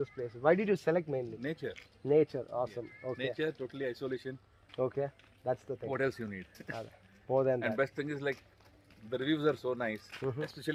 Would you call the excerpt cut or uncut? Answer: uncut